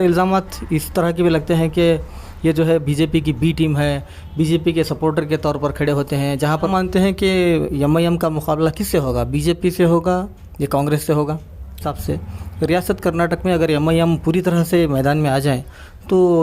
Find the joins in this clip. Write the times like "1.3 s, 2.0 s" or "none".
6.7 s, 11.9 s